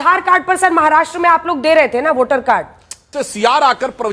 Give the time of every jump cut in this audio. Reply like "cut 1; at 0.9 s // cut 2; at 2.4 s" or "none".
cut 1; at 3.2 s